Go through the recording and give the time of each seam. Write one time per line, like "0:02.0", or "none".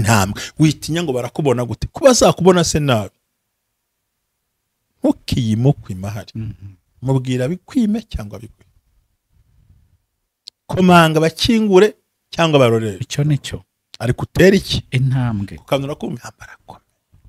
0:16.2